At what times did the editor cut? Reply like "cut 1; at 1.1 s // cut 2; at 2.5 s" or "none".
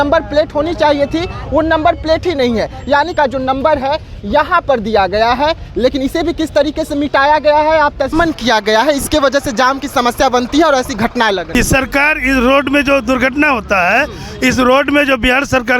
cut 1; at 3.1 s // cut 2; at 8.1 s // cut 3; at 11.4 s